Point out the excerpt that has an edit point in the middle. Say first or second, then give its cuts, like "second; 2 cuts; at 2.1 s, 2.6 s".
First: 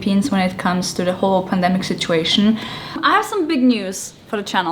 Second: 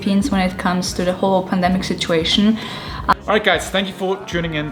first; 1 cut; at 3.0 s